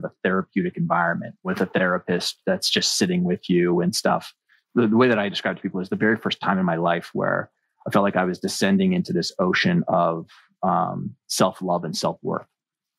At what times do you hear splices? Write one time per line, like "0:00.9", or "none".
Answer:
0:01.5
0:04.6